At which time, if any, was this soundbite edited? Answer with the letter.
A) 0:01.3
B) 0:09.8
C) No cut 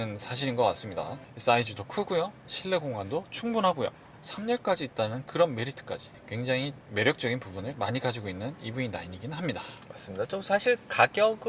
A